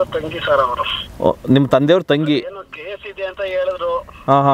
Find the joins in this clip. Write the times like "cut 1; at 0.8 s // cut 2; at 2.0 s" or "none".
none